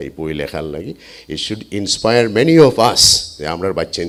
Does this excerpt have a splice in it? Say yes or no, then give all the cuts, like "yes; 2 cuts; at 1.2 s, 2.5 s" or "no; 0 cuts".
no; 0 cuts